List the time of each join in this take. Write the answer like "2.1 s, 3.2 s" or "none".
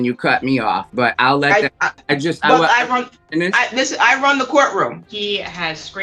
0.9 s, 1.9 s, 5.1 s